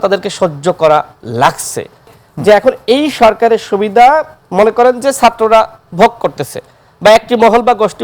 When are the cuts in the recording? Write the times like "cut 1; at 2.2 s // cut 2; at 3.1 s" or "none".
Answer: cut 1; at 2.1 s